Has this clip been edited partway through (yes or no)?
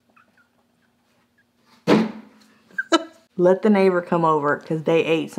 yes